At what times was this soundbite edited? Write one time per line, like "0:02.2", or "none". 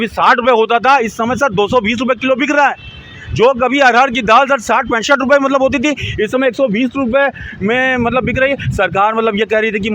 none